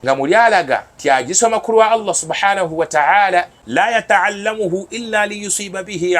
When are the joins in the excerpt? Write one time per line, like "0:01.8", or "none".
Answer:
0:00.9
0:03.9